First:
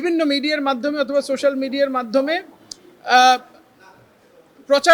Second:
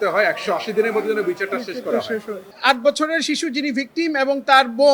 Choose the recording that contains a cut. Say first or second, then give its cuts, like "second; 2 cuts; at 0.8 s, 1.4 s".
second; 1 cut; at 2.4 s